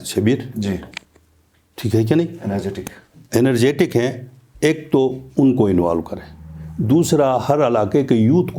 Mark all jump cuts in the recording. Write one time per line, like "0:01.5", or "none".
none